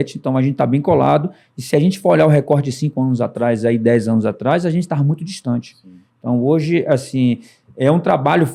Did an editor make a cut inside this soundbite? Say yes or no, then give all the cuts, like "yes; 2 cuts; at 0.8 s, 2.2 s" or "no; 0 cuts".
no; 0 cuts